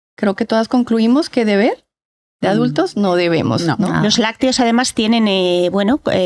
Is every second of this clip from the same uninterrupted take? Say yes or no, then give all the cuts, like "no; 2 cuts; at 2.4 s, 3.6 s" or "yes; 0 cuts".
yes; 0 cuts